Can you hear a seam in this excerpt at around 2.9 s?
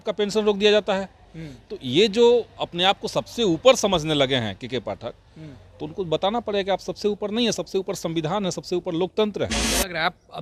no; 0 cuts

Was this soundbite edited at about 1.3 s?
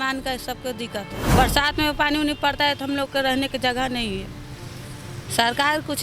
yes; 1 cut; at 1.3 s

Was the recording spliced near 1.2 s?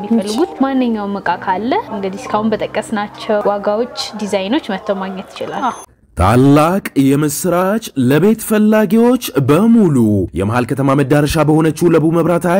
no; 2 cuts; at 3.4 s, 5.8 s

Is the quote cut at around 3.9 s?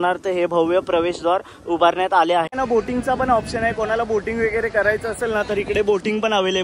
no; 1 cut; at 2.5 s

